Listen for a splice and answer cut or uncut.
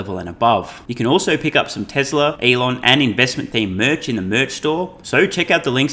cut